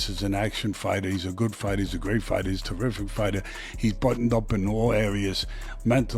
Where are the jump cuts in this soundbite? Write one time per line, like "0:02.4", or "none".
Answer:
none